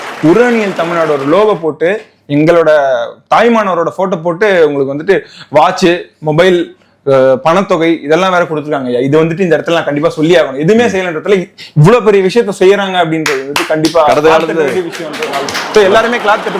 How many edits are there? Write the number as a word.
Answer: zero